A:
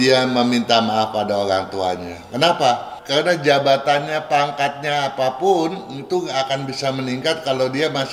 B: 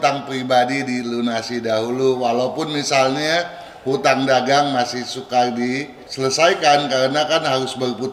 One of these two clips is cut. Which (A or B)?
A